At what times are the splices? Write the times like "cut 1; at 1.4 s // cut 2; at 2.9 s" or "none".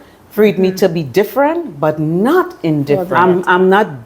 cut 1; at 3.0 s

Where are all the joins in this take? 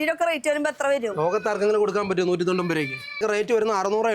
cut 1; at 3.2 s

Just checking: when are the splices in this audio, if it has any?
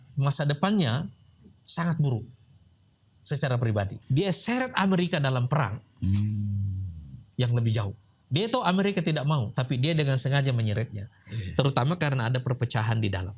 cut 1; at 4.0 s

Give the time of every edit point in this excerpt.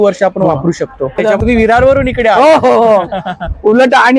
cut 1; at 1.2 s

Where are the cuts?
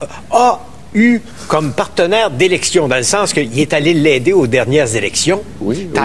cut 1; at 2.3 s

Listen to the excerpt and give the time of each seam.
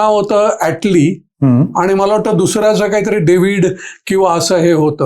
none

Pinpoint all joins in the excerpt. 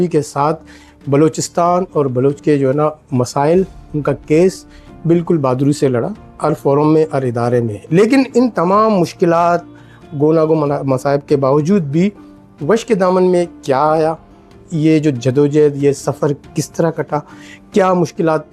none

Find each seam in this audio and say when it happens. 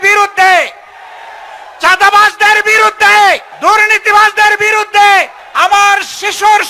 cut 1; at 3.5 s // cut 2; at 5.4 s

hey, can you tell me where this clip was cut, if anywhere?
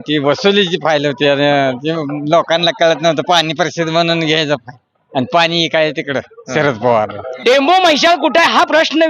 cut 1; at 7.2 s

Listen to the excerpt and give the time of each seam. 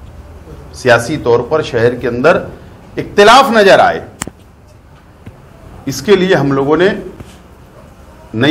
none

